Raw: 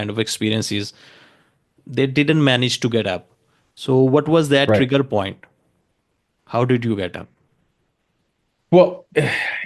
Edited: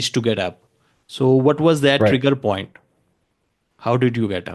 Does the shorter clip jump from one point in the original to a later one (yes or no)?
no